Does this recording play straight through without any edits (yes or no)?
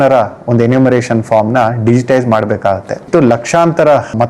no